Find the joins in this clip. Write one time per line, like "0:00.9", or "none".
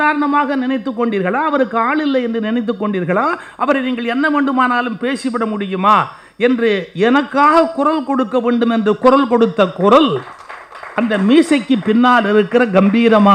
none